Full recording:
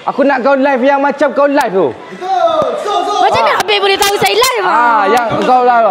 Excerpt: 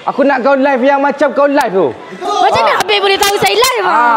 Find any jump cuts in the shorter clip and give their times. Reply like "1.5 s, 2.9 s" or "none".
2.2 s